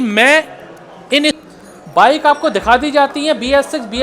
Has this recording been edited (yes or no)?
yes